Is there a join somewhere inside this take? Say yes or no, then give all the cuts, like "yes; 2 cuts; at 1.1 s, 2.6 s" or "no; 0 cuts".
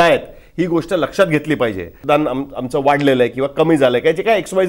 yes; 1 cut; at 1.9 s